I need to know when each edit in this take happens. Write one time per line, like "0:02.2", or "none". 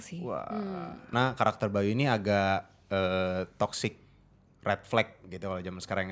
0:01.1